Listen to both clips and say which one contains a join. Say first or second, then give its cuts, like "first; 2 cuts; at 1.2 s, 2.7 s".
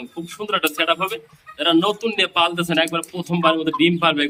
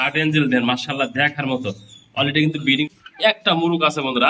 second; 1 cut; at 2.8 s